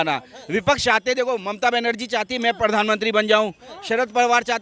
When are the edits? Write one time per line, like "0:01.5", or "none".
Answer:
none